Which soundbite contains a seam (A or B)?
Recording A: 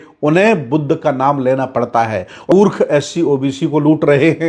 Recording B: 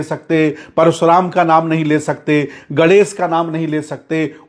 A